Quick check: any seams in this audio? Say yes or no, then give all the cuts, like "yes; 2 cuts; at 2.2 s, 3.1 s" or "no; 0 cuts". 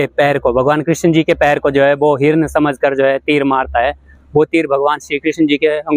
no; 0 cuts